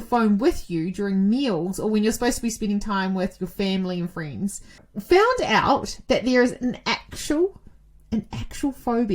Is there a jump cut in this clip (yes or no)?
yes